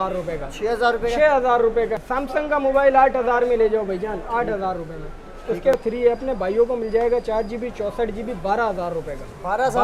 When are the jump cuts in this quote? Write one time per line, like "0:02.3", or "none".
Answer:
0:02.0
0:05.7